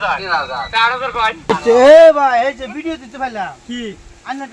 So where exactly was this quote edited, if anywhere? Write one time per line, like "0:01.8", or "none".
0:01.5